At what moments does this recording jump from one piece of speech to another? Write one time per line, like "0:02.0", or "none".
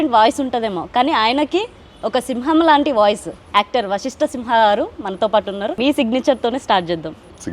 0:03.4
0:05.8